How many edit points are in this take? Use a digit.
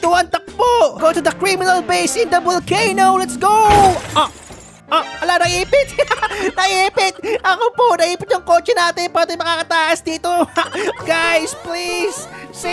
2